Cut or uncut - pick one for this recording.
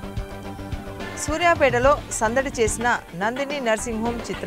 cut